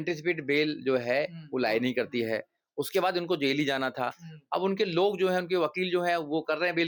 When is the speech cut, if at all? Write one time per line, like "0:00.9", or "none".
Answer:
none